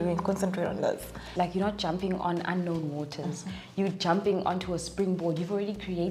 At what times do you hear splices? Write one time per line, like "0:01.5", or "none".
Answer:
0:01.2